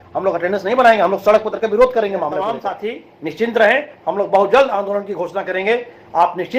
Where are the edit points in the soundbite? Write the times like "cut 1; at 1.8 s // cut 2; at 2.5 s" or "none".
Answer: cut 1; at 2.7 s